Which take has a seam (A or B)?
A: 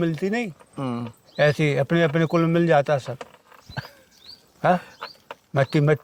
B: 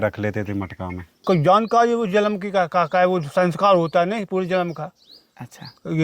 B